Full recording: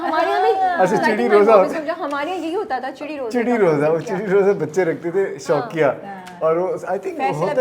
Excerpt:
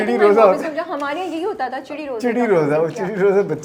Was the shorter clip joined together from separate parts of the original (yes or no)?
no